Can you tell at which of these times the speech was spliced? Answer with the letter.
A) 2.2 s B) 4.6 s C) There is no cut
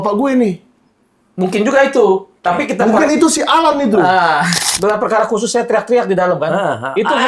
B